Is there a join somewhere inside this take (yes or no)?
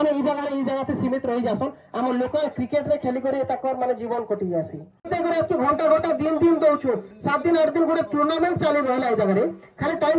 yes